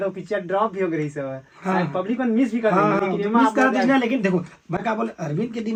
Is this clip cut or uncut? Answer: uncut